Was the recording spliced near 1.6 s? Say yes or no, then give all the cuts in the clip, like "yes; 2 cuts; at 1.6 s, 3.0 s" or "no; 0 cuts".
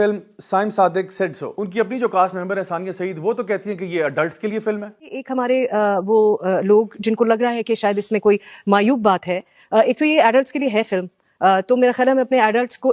yes; 1 cut; at 1.6 s